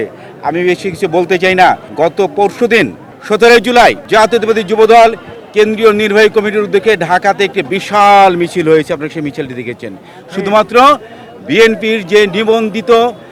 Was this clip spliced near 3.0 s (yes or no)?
no